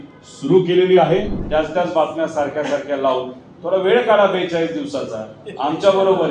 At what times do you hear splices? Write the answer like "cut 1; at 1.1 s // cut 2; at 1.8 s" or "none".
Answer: cut 1; at 1.4 s

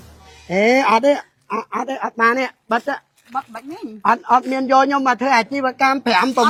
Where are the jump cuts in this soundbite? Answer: none

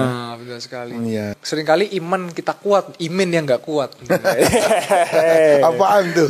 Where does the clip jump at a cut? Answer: cut 1; at 1.4 s

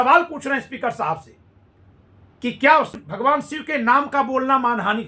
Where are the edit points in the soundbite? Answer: cut 1; at 3.0 s

